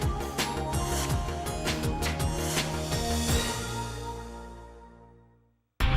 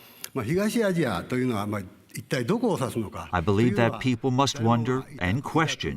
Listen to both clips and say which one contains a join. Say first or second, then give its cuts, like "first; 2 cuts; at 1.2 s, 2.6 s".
second; 1 cut; at 3.2 s